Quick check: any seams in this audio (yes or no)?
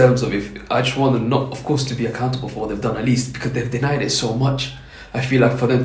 no